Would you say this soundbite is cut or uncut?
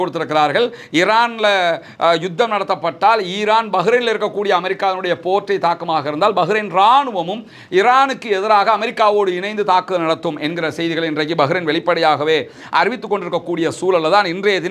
uncut